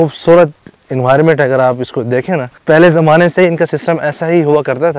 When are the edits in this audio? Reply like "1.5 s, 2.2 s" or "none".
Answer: 2.6 s